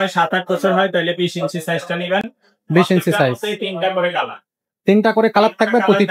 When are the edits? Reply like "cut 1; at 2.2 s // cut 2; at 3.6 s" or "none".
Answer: none